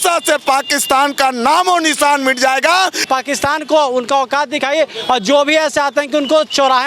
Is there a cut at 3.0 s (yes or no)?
yes